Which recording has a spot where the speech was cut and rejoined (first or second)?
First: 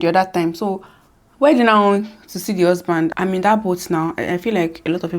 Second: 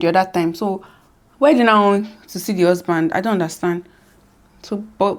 first